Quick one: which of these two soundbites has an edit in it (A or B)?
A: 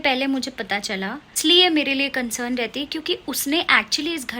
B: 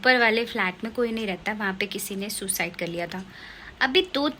A